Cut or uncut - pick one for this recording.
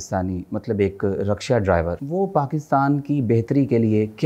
cut